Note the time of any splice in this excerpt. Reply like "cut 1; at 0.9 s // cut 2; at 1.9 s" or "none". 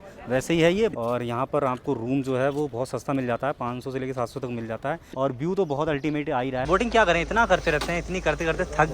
cut 1; at 0.9 s // cut 2; at 5.1 s // cut 3; at 6.6 s